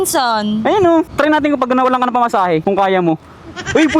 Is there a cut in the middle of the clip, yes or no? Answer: yes